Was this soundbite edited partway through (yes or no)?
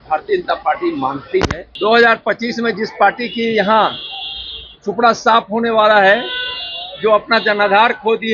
yes